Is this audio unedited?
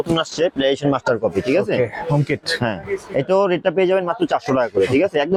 yes; 0 cuts

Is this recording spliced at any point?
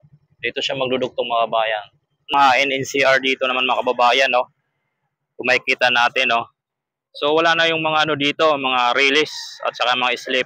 yes; 1 cut; at 2.3 s

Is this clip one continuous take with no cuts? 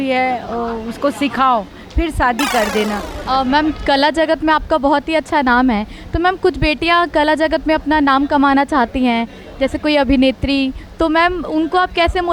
no; 1 cut; at 3.1 s

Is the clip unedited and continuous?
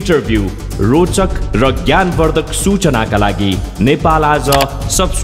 yes; 0 cuts

